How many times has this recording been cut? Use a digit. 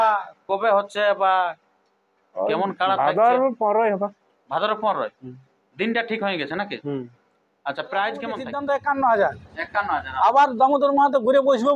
1